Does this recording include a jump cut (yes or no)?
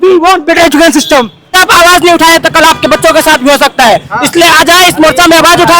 yes